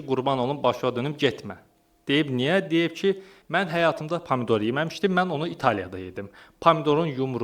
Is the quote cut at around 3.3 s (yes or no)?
yes